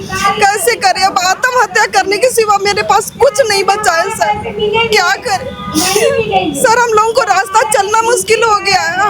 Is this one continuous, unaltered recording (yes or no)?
yes